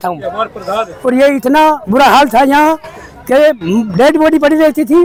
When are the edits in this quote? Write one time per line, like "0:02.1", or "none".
none